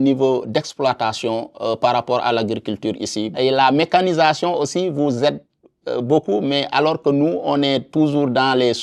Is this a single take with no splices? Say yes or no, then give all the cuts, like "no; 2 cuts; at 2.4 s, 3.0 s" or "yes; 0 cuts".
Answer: no; 1 cut; at 3.4 s